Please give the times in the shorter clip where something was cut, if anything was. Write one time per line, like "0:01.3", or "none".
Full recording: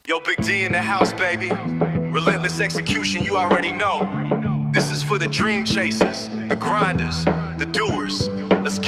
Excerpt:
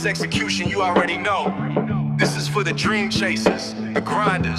none